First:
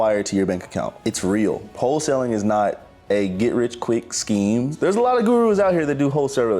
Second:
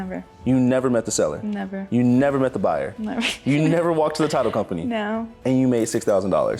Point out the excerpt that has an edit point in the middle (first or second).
first